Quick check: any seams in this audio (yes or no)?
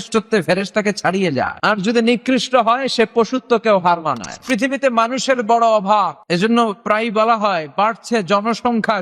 yes